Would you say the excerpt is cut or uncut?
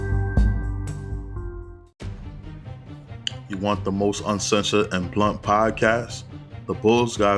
cut